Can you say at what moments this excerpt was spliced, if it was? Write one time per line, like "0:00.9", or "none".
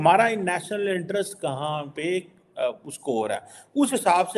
none

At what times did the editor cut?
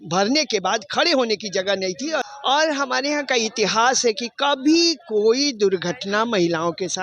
0:02.2

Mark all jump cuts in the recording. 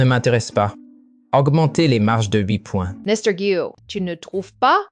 0:02.9
0:03.8

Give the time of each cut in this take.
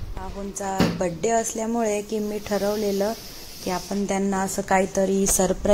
none

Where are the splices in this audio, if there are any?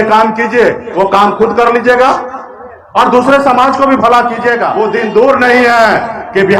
0:04.7

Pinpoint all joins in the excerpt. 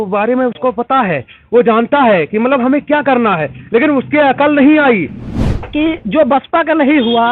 0:05.4

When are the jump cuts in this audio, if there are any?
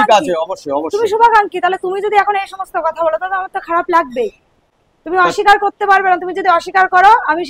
none

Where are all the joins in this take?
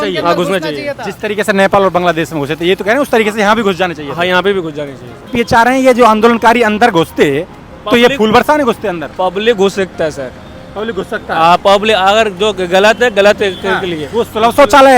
0:05.3

